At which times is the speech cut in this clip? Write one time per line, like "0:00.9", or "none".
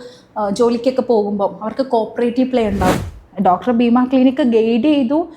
0:02.9